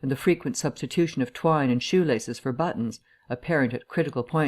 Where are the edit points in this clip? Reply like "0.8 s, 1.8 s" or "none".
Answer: 2.2 s

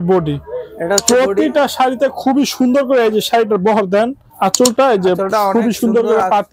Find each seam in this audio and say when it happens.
4.2 s

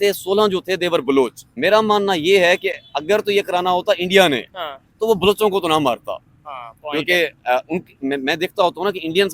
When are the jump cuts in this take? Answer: 1.4 s

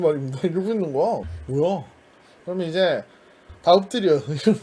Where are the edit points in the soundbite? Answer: 1.4 s

